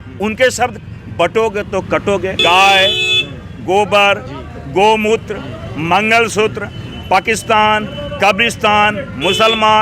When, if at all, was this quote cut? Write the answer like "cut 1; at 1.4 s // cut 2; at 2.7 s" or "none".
cut 1; at 2.4 s